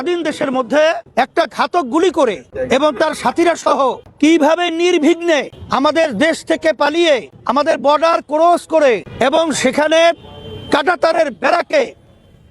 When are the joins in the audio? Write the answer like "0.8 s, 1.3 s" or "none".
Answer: 1.0 s, 2.5 s, 4.0 s, 5.6 s, 7.3 s, 9.1 s